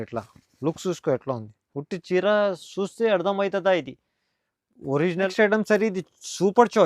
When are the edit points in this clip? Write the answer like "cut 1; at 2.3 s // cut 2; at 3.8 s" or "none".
cut 1; at 5.3 s